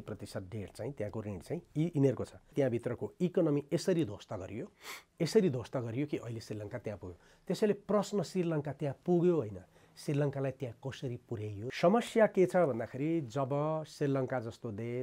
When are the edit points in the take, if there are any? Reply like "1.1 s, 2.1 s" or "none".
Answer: 2.5 s, 11.7 s

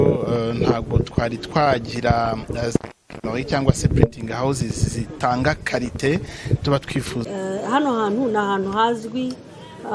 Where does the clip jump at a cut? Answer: 7.2 s

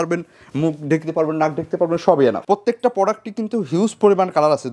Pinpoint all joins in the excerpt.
2.4 s

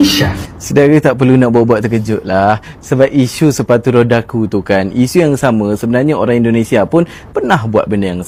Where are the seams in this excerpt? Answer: none

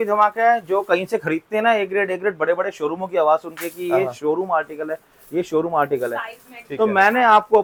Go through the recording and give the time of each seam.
none

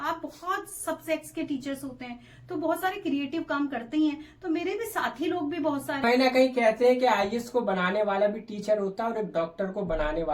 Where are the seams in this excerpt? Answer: 6.0 s

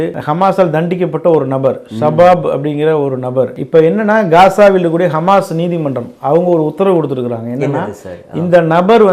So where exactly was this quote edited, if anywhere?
3.5 s

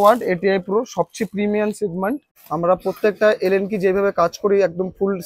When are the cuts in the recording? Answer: 2.4 s

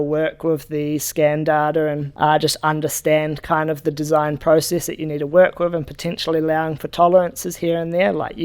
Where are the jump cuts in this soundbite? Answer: 2.1 s

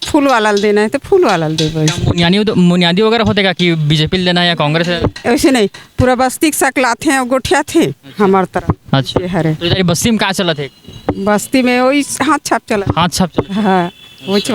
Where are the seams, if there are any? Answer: none

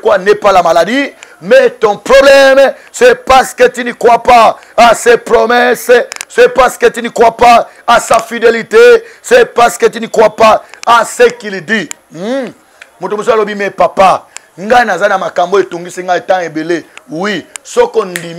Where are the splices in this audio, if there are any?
none

